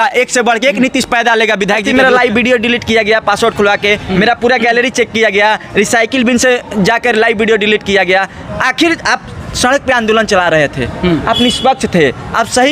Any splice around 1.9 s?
yes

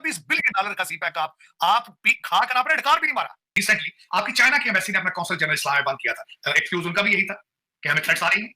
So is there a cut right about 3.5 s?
yes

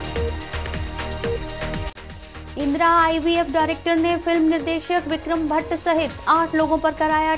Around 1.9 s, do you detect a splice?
yes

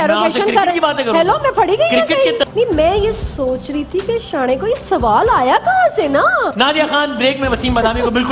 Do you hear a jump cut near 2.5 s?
yes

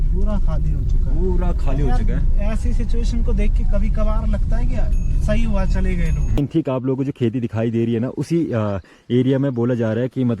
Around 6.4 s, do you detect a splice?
yes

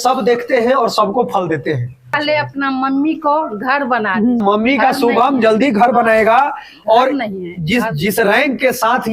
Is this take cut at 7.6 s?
no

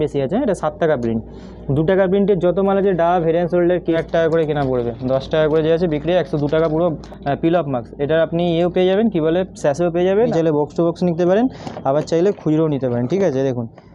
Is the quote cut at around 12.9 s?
no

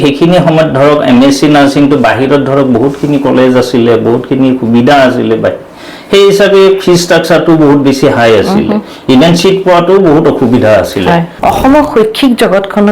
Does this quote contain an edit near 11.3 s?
yes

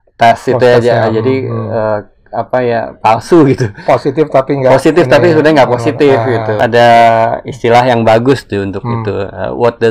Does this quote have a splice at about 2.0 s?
no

